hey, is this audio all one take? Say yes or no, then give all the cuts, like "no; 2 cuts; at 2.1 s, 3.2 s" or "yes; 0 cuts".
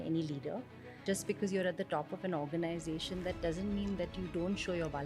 no; 1 cut; at 1.0 s